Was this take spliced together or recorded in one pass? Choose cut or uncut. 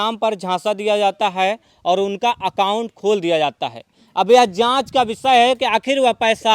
uncut